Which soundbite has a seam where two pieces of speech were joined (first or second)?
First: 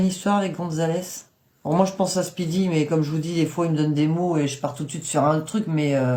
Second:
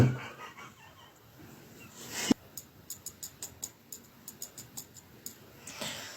second